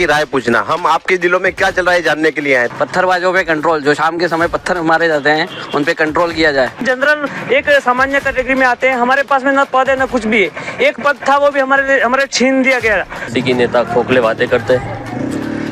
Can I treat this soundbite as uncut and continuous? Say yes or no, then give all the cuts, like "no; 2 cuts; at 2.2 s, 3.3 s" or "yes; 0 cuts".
no; 3 cuts; at 2.7 s, 6.8 s, 13.3 s